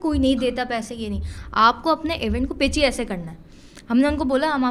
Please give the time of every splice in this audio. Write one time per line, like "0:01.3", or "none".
none